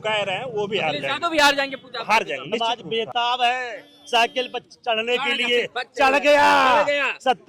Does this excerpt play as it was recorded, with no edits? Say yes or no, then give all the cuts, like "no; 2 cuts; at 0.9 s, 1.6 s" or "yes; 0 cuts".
no; 1 cut; at 2.6 s